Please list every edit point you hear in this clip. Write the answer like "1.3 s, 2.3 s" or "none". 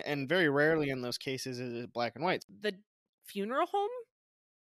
2.4 s